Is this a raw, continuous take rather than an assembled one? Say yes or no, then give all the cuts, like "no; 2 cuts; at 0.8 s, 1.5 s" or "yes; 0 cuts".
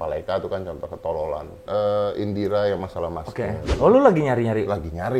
no; 2 cuts; at 1.6 s, 3.7 s